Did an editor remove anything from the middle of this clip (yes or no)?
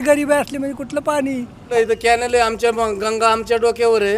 yes